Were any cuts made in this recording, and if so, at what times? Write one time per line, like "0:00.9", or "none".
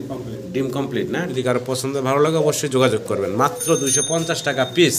0:01.3